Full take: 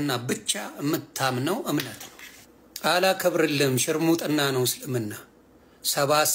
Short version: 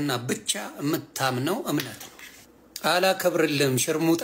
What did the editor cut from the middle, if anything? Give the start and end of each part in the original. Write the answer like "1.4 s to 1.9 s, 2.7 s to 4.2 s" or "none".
none